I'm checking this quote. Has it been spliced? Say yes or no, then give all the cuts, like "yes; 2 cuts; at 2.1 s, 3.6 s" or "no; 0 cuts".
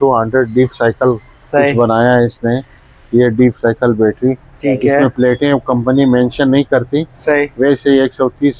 no; 0 cuts